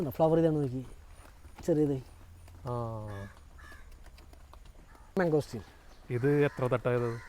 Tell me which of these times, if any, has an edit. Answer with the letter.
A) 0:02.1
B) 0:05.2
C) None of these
B